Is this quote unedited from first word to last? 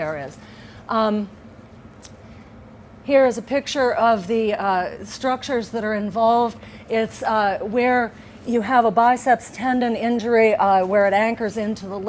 no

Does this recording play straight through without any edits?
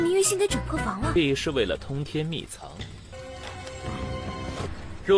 no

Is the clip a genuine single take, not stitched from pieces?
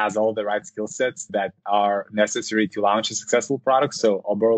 yes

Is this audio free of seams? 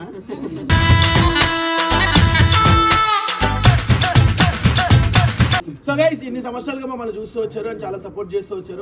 yes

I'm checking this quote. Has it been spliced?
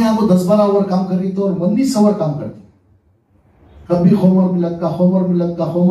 no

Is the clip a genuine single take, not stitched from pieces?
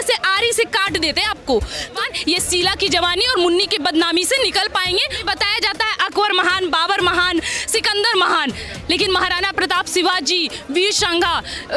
no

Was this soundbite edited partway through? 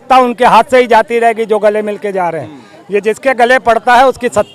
no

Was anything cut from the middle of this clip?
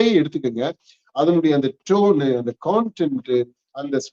no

